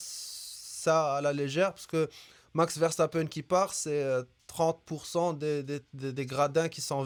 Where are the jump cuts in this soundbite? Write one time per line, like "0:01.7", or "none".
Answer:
none